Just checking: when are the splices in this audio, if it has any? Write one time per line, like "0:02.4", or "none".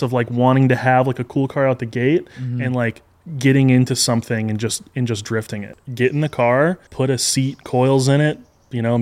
0:05.7
0:06.9